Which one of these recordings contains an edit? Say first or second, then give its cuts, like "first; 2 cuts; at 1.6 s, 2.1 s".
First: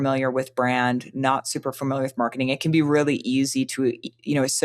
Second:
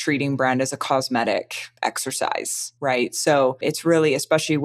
second; 3 cuts; at 1.6 s, 2.6 s, 3.6 s